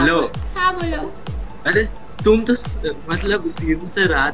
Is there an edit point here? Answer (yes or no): no